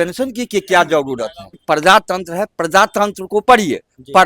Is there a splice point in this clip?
yes; 1 cut; at 1.5 s

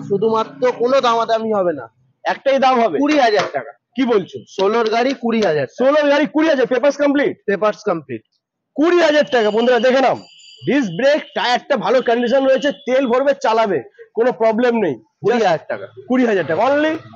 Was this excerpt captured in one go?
yes; 0 cuts

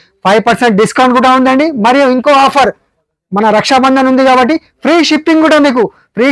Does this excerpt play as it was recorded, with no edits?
yes; 0 cuts

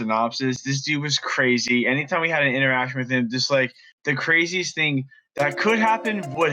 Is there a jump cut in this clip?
no; 0 cuts

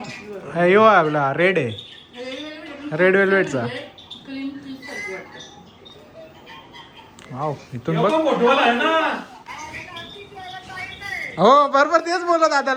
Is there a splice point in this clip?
no; 0 cuts

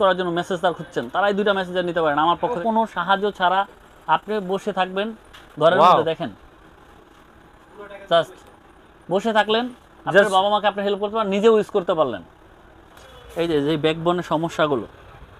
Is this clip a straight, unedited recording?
no; 2 cuts; at 2.6 s, 13.0 s

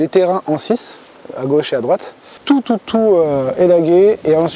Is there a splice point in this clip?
yes; 1 cut; at 2.3 s

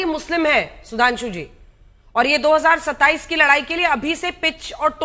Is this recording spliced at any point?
no; 0 cuts

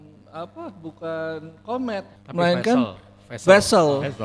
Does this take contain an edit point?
yes; 1 cut; at 2.2 s

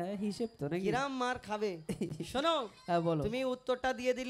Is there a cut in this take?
no; 0 cuts

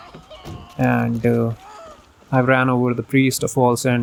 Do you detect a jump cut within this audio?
no; 0 cuts

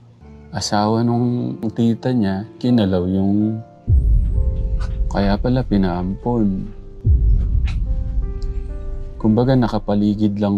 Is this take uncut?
yes; 0 cuts

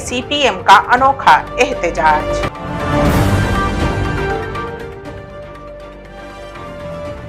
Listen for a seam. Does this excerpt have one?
no; 0 cuts

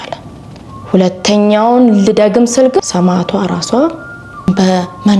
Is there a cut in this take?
yes; 2 cuts; at 2.8 s, 4.4 s

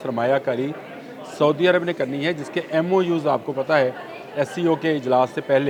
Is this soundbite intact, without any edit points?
yes; 0 cuts

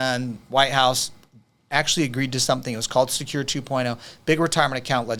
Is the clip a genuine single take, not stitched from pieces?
yes; 0 cuts

